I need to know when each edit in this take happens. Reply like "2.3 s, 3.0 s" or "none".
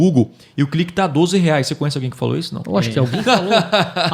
none